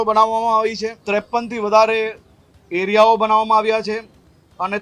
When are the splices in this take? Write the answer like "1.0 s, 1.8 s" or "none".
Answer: 0.9 s